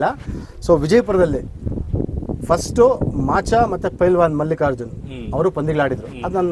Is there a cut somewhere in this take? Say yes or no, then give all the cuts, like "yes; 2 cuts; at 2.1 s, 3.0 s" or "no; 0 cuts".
no; 0 cuts